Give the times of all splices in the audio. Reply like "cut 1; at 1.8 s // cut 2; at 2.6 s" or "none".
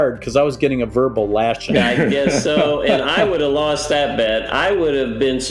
cut 1; at 1.6 s